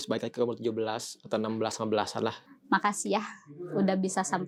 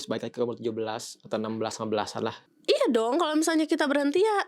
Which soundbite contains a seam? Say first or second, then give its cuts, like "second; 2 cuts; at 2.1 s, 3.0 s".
second; 1 cut; at 2.5 s